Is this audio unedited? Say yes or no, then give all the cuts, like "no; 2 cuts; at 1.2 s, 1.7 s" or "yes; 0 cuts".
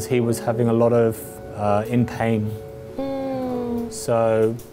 yes; 0 cuts